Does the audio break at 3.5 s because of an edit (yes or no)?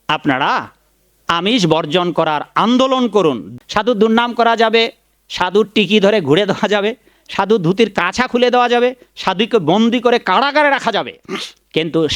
yes